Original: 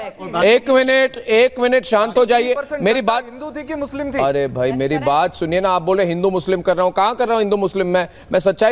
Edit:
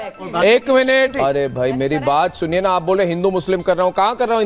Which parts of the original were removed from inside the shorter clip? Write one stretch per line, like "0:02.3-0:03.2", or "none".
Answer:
0:01.1-0:04.1